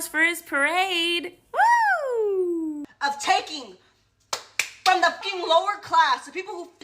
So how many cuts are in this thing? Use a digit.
1